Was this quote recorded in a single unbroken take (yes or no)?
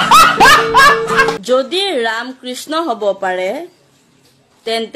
no